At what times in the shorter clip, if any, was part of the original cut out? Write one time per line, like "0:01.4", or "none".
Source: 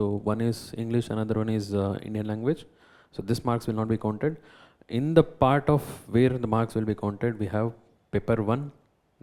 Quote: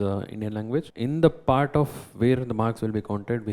0:00.9